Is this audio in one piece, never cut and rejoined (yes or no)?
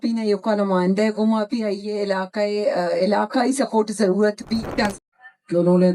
no